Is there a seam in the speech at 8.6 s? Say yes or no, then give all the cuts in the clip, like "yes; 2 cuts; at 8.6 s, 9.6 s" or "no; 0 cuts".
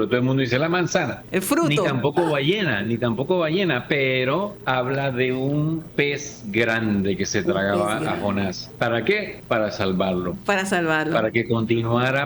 yes; 5 cuts; at 1.2 s, 4.6 s, 6.0 s, 8.6 s, 9.3 s